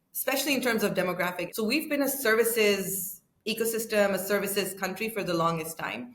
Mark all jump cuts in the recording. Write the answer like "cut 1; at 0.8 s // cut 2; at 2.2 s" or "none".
cut 1; at 1.4 s